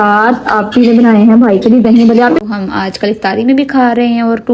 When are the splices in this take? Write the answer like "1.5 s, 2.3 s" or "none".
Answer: 2.4 s